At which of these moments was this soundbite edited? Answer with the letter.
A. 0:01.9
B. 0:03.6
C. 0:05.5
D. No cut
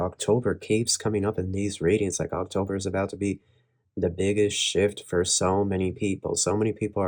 D